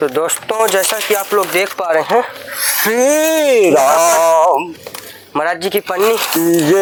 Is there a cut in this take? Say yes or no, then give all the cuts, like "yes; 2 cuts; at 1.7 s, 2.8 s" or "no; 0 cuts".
no; 0 cuts